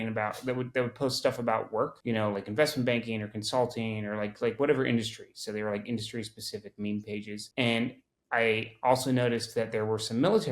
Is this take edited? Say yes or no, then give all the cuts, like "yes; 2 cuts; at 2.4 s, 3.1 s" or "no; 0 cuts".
yes; 2 cuts; at 2.0 s, 7.4 s